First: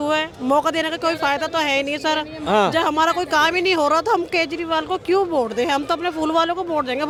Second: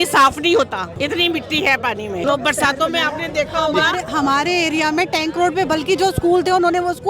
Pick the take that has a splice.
second; 2 cuts; at 0.9 s, 2.2 s

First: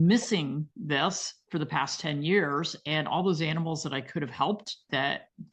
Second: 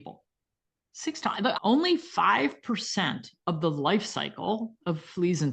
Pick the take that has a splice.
second; 1 cut; at 1.6 s

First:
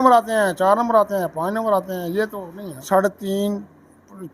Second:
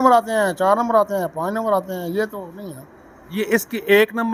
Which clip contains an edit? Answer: first; 1 cut; at 2.8 s

